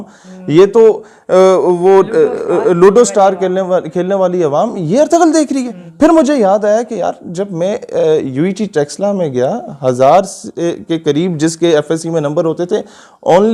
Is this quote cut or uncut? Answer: uncut